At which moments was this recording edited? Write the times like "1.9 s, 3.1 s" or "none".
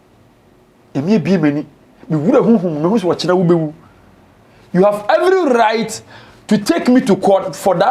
none